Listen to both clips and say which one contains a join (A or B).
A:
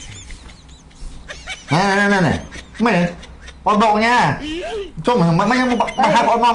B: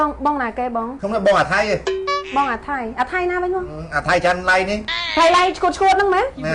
B